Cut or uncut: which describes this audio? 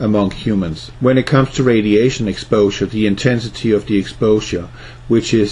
uncut